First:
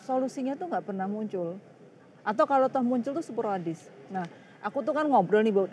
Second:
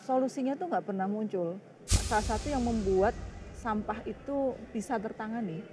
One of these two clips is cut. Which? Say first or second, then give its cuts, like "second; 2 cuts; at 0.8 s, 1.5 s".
second; 1 cut; at 2.0 s